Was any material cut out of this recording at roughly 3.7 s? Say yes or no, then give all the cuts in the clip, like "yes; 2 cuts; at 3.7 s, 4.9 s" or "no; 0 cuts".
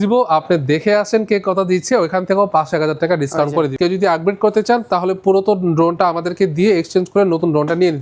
yes; 1 cut; at 3.7 s